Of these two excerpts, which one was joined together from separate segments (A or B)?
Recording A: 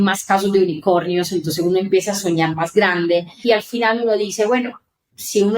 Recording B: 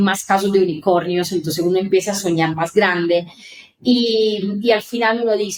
A